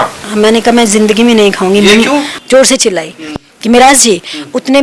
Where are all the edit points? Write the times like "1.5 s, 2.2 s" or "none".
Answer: 2.3 s

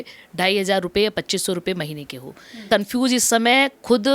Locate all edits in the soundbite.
2.6 s

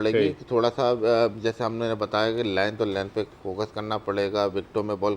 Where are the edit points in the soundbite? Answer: none

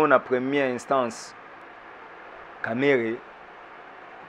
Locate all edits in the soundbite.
1.6 s

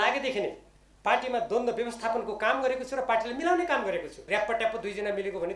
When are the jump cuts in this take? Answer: 4.2 s

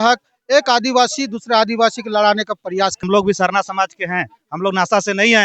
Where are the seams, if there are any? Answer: 3.0 s

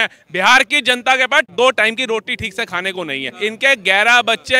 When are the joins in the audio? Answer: 3.3 s

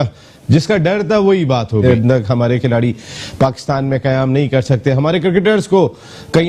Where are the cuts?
1.8 s

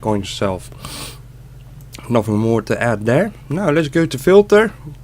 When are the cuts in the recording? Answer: 3.9 s

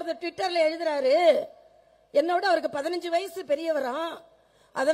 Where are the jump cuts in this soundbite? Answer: none

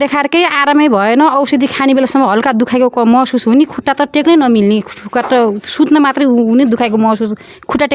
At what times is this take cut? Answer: none

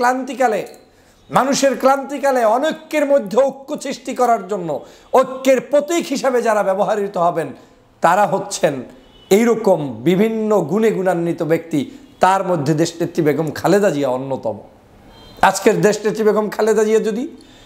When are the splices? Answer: none

